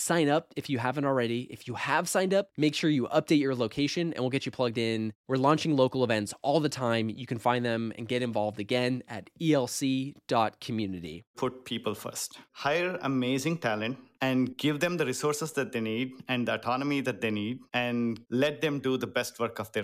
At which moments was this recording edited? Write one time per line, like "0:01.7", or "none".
0:11.3
0:12.5
0:14.5
0:17.8